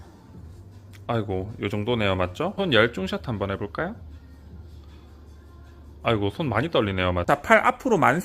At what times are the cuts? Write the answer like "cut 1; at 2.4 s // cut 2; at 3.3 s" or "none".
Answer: cut 1; at 2.5 s // cut 2; at 7.2 s